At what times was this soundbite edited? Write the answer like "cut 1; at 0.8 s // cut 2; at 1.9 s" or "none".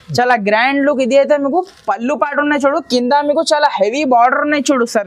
none